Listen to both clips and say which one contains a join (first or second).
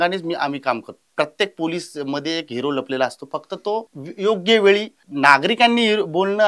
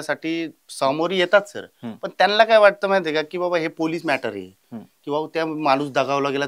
first